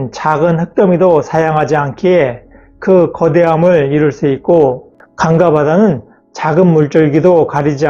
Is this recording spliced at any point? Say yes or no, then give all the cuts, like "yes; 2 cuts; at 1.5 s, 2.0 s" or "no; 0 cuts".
no; 0 cuts